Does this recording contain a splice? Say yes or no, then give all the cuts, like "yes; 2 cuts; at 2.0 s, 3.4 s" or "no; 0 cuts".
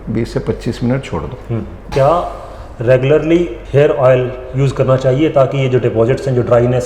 yes; 2 cuts; at 1.8 s, 3.6 s